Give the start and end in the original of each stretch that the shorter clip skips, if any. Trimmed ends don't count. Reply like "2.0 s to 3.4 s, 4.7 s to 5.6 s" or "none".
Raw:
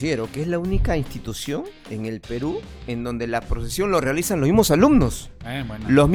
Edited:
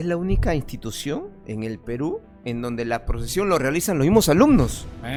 none